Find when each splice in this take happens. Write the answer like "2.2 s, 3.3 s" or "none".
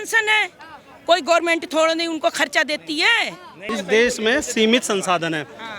3.7 s